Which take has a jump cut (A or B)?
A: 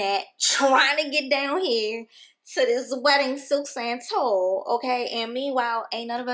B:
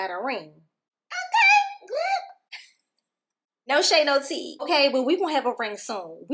B